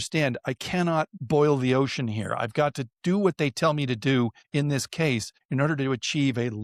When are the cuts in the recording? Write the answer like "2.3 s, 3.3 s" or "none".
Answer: none